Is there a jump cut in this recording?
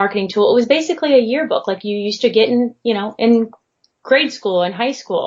no; 0 cuts

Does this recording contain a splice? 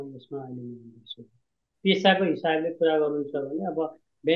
yes; 1 cut; at 1.6 s

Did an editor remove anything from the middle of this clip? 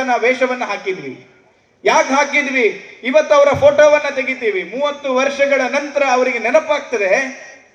no; 0 cuts

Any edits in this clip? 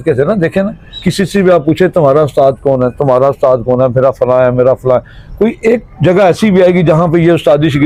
no; 0 cuts

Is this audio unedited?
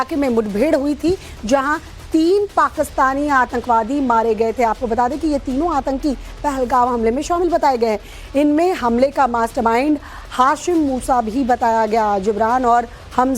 no; 1 cut; at 8.8 s

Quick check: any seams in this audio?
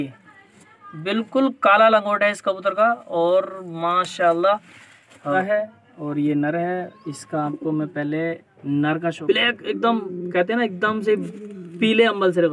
yes; 2 cuts; at 5.4 s, 9.2 s

